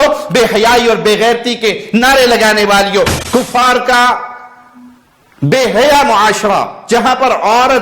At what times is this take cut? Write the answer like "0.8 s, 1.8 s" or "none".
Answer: 3.2 s

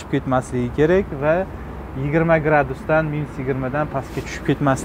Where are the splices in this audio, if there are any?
none

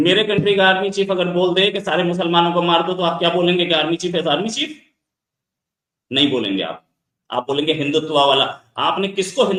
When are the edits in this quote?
none

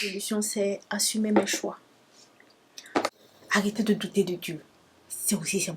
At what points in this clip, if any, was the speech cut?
3.3 s

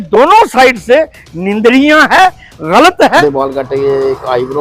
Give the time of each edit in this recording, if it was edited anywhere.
3.2 s

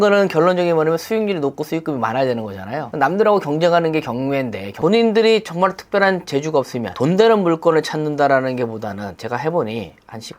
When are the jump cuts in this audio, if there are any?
6.9 s

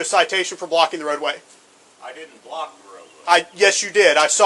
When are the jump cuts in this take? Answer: none

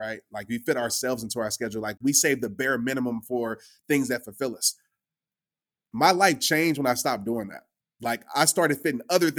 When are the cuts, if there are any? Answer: 2.0 s

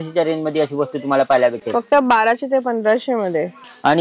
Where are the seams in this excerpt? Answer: none

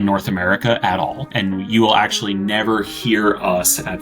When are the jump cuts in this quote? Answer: 1.3 s

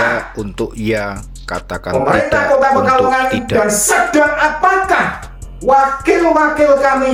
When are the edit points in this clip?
none

